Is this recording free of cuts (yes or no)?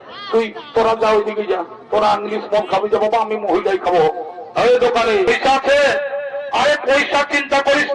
no